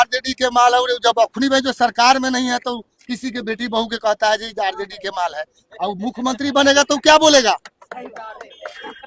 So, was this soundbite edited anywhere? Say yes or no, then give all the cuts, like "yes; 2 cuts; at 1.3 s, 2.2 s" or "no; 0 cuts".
no; 0 cuts